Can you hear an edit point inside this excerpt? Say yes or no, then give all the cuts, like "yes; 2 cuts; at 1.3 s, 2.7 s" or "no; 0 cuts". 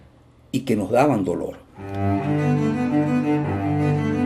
yes; 1 cut; at 1.7 s